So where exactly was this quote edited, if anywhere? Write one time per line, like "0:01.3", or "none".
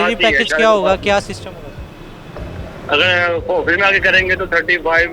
none